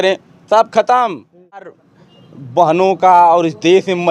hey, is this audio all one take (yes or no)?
no